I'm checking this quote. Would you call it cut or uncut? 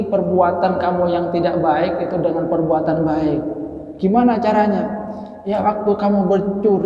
uncut